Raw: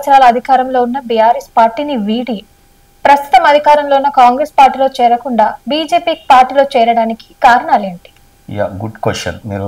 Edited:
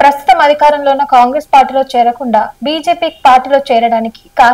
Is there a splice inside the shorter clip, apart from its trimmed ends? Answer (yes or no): no